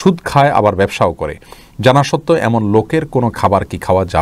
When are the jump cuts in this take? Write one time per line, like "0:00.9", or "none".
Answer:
none